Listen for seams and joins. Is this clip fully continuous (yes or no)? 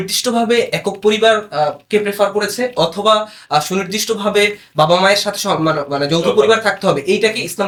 yes